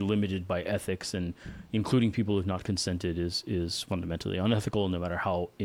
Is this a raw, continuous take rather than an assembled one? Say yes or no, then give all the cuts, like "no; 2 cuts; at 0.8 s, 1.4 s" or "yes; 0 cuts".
yes; 0 cuts